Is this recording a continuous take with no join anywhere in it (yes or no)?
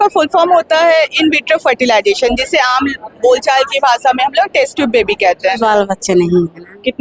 no